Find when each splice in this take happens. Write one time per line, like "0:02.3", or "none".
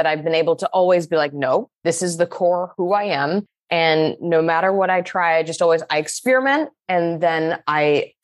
0:01.7